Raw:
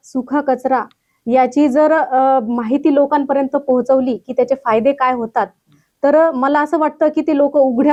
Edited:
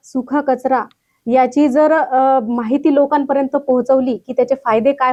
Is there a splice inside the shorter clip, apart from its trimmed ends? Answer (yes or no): no